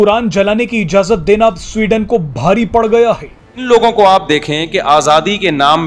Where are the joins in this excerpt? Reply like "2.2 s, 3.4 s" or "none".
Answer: 3.6 s

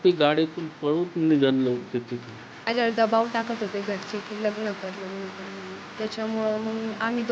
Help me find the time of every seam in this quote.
2.7 s

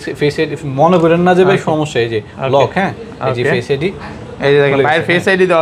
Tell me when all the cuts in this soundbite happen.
none

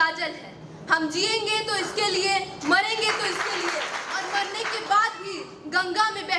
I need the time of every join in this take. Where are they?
4.0 s

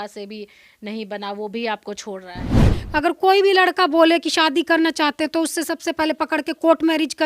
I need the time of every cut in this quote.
2.6 s

